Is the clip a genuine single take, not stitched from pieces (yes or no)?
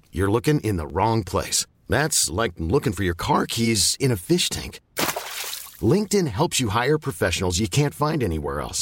yes